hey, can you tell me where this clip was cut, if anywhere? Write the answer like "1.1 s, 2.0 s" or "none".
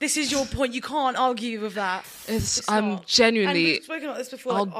2.0 s